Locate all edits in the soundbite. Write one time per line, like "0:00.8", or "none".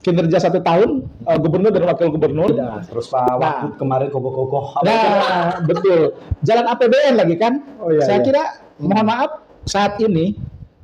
0:02.7